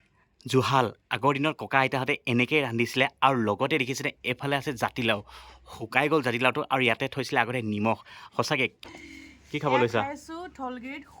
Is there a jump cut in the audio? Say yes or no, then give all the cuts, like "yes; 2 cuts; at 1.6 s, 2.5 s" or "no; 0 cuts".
yes; 1 cut; at 8.8 s